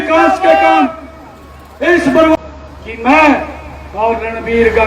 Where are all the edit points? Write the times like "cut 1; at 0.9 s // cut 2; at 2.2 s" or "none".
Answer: cut 1; at 2.4 s